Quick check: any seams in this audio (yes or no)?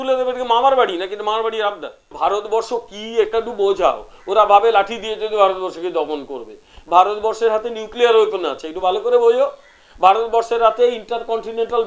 yes